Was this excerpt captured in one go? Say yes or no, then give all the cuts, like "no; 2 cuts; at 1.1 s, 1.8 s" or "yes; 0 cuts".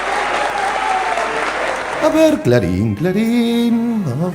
no; 1 cut; at 2.0 s